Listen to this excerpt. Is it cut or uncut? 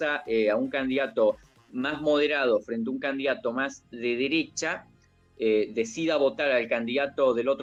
uncut